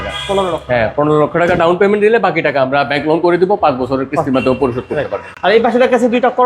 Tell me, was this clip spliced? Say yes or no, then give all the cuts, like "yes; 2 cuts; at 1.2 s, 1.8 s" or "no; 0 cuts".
no; 0 cuts